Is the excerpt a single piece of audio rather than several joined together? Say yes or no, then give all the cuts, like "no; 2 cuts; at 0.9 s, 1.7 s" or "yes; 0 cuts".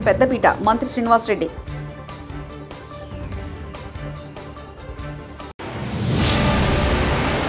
yes; 0 cuts